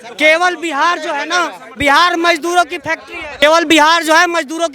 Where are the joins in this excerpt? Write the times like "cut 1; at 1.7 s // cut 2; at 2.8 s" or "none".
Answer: none